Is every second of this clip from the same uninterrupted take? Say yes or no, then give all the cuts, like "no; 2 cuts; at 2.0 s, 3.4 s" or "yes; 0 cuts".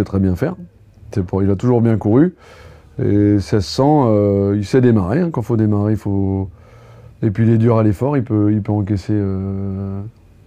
yes; 0 cuts